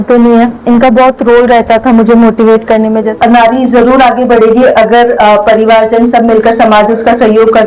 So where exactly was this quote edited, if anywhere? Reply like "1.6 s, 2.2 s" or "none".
3.1 s